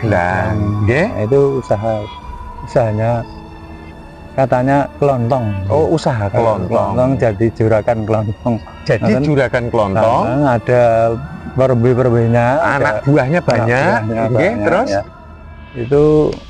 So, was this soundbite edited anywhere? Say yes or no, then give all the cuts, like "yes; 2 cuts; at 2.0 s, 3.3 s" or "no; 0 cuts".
no; 0 cuts